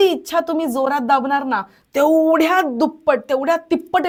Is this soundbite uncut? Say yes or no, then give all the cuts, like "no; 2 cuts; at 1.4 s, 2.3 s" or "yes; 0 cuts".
yes; 0 cuts